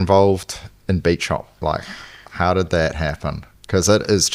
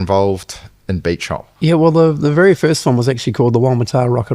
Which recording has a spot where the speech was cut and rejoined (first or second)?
second